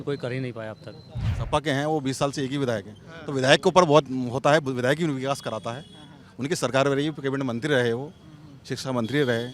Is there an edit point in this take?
yes; 1 cut; at 1.3 s

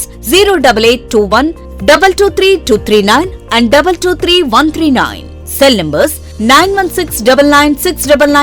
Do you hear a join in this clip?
no; 0 cuts

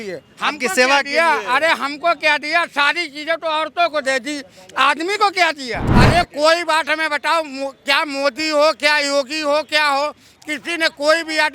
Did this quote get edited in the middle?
yes; 1 cut; at 5.8 s

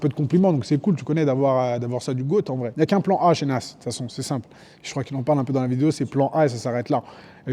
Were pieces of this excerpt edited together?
yes; 1 cut; at 2.7 s

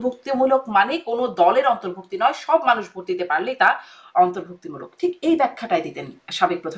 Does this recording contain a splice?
no; 0 cuts

